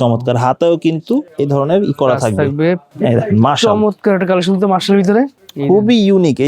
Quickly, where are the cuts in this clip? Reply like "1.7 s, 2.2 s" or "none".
1.3 s, 2.9 s, 5.4 s

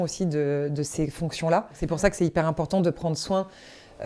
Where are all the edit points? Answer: 1.8 s

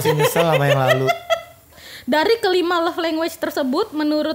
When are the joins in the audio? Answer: none

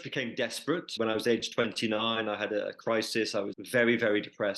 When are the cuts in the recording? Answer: 0.9 s, 3.6 s

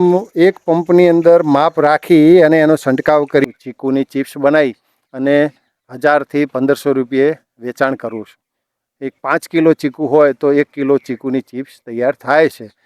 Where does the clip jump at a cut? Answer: 3.4 s

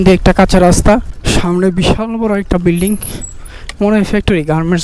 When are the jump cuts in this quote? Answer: 1.1 s

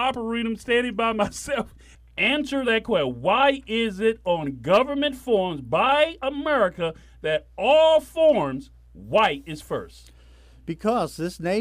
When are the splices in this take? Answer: 1.8 s

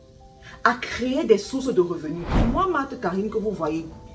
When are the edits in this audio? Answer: 2.3 s

